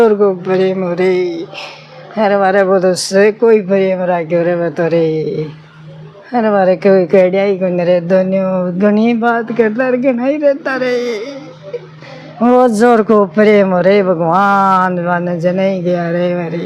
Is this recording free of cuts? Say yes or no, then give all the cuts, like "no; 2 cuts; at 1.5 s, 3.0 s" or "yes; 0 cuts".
yes; 0 cuts